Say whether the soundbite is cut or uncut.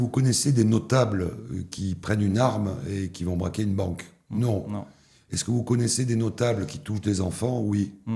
uncut